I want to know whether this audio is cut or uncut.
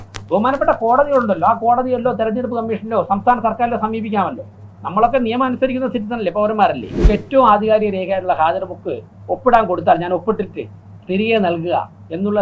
cut